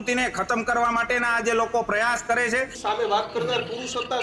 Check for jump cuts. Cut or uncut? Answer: cut